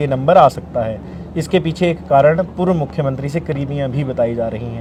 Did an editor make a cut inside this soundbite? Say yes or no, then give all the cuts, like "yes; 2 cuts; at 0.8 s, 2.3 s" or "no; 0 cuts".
no; 0 cuts